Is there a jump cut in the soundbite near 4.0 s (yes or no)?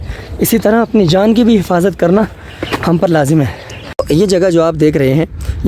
yes